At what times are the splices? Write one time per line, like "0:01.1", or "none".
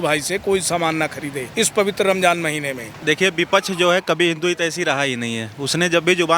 0:01.4
0:02.9